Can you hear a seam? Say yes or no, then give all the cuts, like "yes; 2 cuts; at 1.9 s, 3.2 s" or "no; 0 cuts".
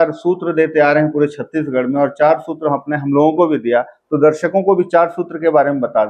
no; 0 cuts